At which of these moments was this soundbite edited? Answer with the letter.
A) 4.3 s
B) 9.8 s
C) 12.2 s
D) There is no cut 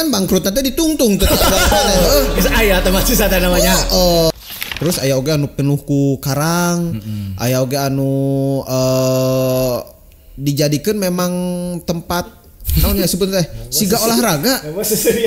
A